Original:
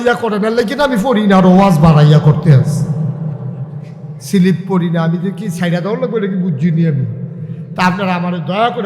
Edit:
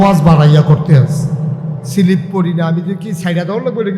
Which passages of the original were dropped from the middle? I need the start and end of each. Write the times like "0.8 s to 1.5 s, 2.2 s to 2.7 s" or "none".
3.3 s to 4.1 s